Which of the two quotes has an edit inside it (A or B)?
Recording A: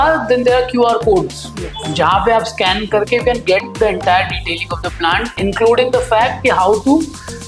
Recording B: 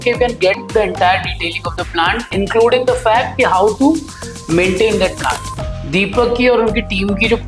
B